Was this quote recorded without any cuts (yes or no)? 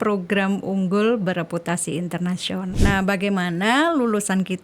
no